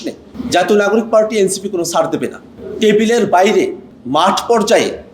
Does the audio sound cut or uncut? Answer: cut